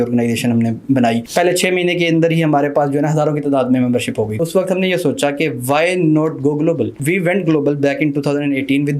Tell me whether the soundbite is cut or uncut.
cut